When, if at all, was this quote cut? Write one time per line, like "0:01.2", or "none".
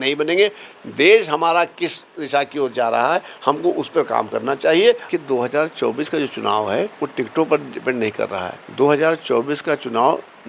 0:05.0
0:06.9
0:08.6